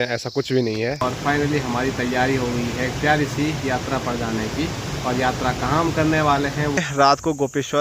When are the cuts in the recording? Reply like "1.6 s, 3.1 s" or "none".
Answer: 1.0 s, 6.8 s